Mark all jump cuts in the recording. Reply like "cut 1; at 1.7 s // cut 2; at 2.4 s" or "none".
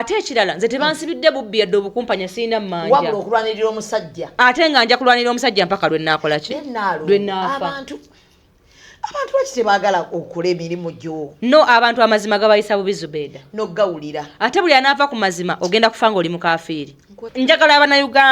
cut 1; at 17.2 s